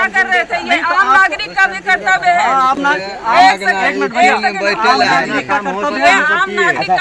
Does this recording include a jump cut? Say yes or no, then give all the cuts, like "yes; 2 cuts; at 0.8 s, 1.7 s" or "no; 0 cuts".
no; 0 cuts